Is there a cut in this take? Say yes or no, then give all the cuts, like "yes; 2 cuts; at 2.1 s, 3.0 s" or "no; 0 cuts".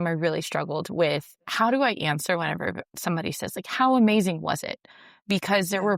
no; 0 cuts